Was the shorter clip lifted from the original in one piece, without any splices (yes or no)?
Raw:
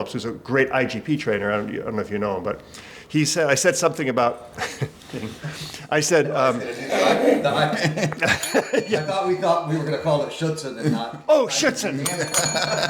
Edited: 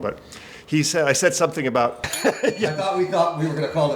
no